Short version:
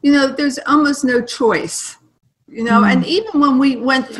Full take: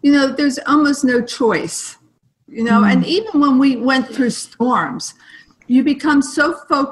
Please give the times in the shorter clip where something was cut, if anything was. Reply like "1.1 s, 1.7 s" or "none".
none